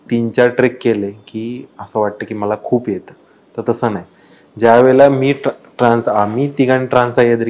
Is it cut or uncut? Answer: uncut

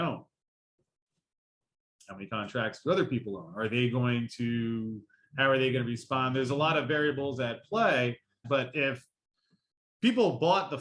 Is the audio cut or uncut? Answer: cut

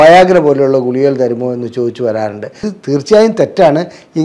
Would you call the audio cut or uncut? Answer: cut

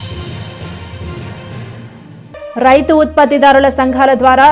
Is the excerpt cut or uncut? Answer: cut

